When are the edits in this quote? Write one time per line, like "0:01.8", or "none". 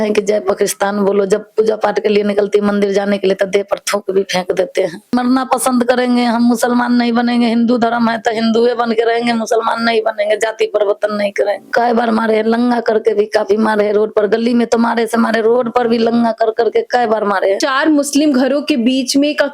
0:05.1
0:11.6
0:17.6